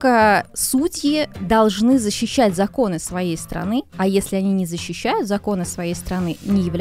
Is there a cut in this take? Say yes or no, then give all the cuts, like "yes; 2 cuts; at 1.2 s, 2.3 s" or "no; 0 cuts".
no; 0 cuts